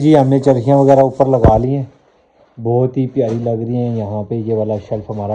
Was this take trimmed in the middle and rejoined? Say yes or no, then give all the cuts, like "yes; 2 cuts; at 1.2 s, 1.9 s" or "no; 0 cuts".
no; 0 cuts